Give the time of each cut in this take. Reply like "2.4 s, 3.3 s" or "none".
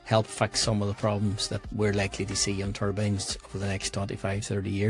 none